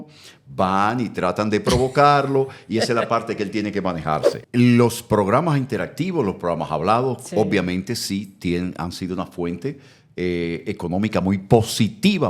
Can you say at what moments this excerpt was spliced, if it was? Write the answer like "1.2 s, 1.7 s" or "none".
4.4 s